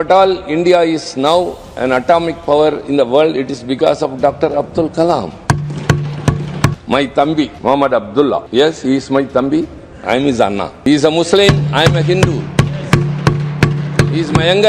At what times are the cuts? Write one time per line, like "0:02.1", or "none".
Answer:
0:06.8
0:07.5
0:08.5
0:10.8